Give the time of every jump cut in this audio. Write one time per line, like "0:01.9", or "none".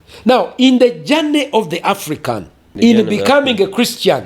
0:02.6